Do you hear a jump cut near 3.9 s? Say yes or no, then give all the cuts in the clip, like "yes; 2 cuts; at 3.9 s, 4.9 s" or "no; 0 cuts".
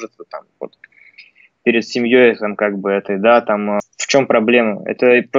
yes; 1 cut; at 3.9 s